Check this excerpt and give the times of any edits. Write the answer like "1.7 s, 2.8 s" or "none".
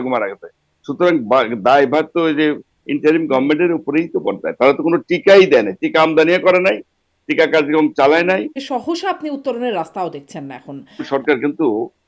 8.6 s, 11.0 s